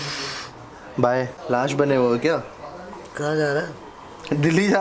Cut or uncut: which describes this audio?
cut